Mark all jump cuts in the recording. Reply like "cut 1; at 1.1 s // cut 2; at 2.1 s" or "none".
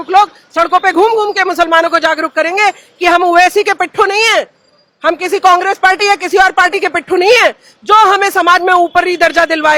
none